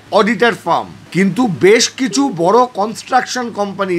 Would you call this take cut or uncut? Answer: cut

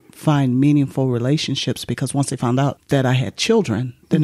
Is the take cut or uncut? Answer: cut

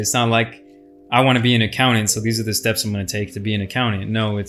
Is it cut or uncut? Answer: uncut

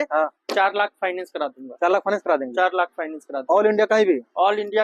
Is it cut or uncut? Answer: uncut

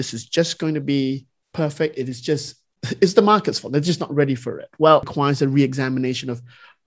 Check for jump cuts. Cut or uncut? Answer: cut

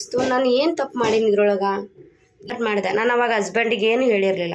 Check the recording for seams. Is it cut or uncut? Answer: cut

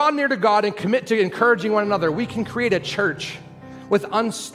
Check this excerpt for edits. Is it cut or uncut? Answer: uncut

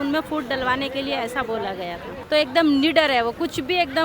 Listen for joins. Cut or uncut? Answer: cut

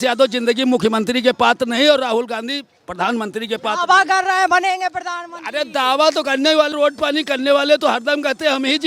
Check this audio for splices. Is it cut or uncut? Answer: uncut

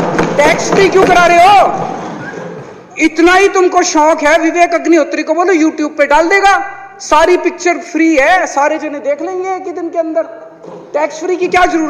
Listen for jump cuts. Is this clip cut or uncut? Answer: uncut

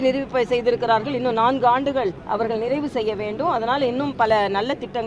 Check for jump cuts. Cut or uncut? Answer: cut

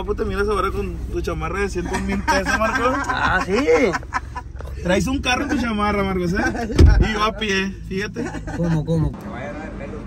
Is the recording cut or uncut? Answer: cut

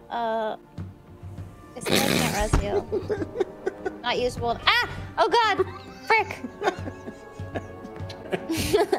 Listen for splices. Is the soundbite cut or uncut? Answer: uncut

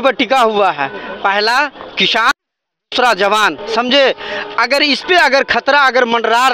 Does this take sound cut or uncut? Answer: uncut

